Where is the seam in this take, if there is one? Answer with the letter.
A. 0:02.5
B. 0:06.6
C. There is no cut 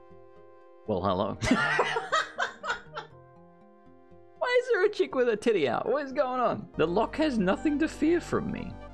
B